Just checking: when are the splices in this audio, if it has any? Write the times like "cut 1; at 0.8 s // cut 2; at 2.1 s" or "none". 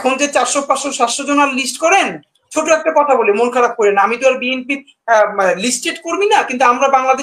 none